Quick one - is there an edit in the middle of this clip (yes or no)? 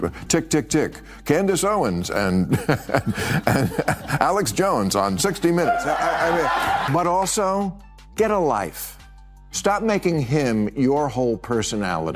yes